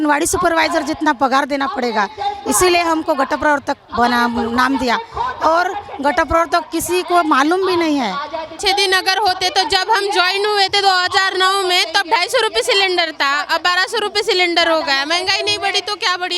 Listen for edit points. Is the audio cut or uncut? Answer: uncut